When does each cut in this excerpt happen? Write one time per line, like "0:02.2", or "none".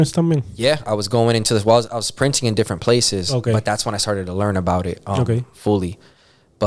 none